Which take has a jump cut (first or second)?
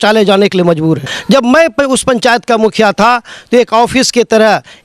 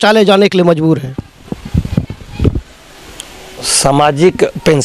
first